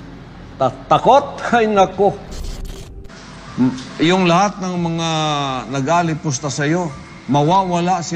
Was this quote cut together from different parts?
yes; 1 cut; at 2.6 s

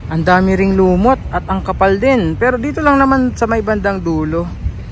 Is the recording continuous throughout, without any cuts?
yes; 0 cuts

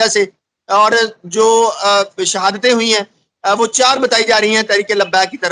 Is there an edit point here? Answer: no; 0 cuts

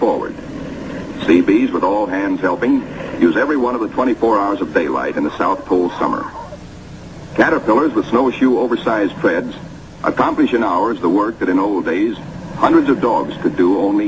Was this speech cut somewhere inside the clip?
no; 0 cuts

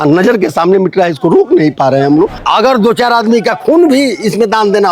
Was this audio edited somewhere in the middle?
yes; 1 cut; at 2.4 s

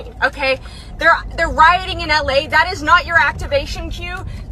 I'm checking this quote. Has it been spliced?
no; 0 cuts

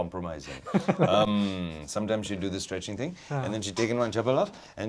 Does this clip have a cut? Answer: no; 0 cuts

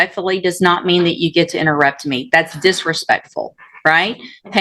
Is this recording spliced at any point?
no; 0 cuts

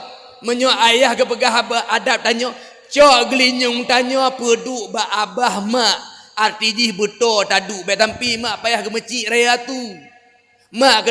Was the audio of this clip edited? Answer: no; 0 cuts

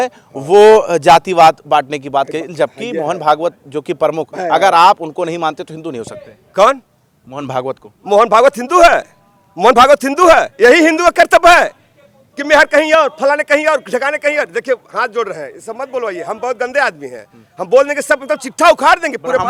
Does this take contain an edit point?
no; 0 cuts

